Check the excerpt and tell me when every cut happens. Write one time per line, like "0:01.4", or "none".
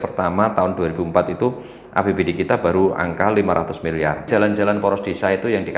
0:04.3